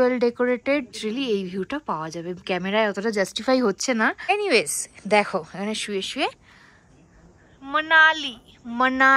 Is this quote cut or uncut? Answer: cut